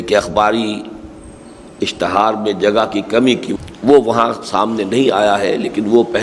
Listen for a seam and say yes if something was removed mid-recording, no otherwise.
yes